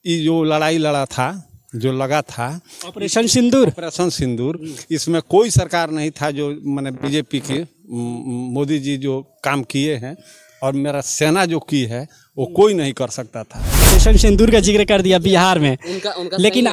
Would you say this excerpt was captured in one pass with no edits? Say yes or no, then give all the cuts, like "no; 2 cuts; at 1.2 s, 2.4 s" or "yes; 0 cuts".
no; 1 cut; at 14.0 s